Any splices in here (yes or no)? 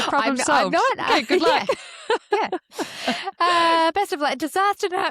no